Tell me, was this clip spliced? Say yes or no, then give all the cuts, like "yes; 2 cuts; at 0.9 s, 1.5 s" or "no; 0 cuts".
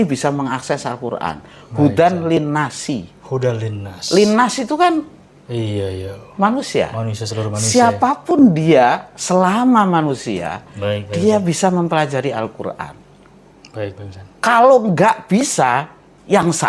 no; 0 cuts